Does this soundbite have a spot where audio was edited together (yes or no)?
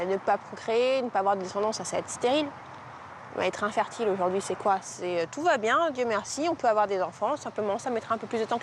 no